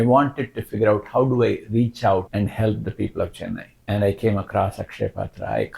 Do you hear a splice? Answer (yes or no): yes